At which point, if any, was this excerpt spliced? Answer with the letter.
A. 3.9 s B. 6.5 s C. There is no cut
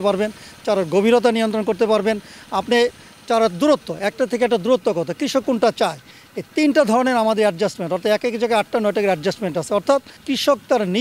C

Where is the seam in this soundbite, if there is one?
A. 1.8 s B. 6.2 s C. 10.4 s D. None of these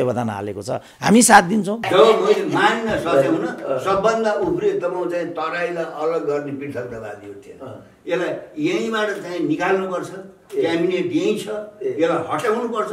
A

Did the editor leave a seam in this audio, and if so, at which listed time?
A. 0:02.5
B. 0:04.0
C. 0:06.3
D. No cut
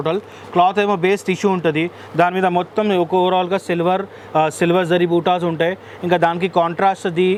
D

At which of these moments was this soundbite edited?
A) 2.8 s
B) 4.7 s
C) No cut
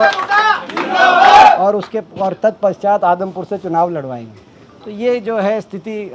C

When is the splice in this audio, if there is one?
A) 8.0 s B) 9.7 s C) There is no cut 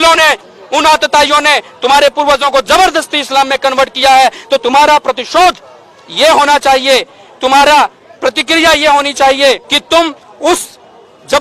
B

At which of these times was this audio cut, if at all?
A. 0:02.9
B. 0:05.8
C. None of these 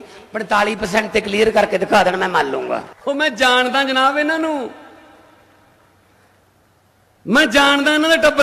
A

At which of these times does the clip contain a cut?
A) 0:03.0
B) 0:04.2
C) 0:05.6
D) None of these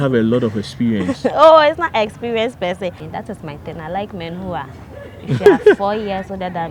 A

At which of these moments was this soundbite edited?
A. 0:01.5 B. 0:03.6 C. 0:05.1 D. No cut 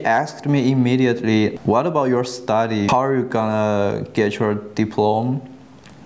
A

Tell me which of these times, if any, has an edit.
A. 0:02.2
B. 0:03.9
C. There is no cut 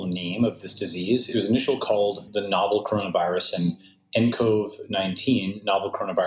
A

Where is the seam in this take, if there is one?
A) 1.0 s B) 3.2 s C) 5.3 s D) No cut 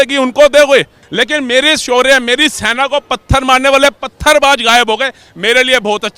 A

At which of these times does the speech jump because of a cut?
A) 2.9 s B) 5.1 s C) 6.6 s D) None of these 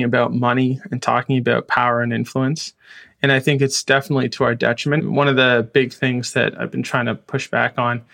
B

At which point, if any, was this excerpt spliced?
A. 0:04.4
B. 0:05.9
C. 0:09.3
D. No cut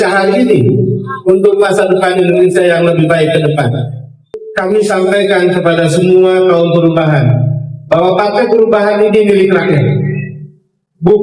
A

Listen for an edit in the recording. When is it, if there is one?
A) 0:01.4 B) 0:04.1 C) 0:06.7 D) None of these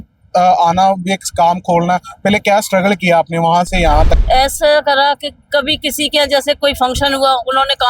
B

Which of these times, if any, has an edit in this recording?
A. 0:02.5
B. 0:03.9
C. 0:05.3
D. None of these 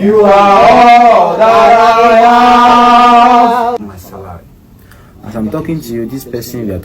B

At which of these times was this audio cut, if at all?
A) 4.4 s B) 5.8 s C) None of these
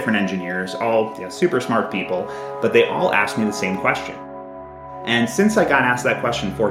A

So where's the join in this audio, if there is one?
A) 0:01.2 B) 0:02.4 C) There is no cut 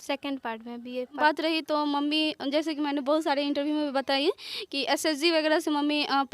A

